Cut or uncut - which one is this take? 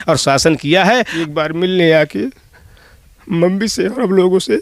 cut